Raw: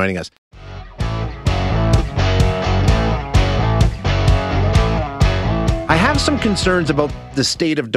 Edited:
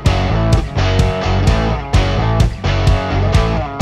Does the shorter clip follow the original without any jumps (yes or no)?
yes